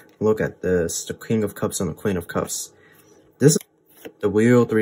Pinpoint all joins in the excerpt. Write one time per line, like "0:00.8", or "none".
0:03.6